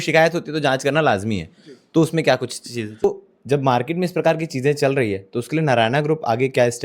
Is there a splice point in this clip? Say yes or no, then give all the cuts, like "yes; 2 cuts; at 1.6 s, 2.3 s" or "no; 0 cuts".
yes; 1 cut; at 3.0 s